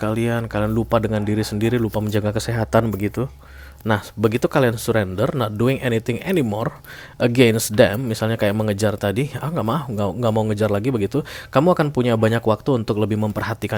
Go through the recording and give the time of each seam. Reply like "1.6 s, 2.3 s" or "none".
none